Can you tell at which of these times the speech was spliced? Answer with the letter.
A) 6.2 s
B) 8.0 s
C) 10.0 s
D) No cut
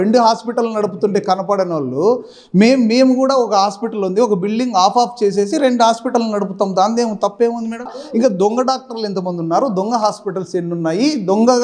B